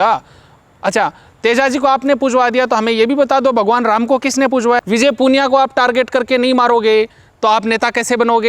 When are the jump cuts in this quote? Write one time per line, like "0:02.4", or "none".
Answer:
0:04.8